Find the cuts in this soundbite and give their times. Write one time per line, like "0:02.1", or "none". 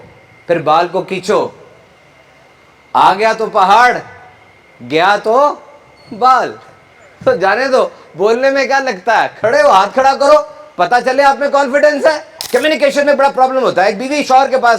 0:12.3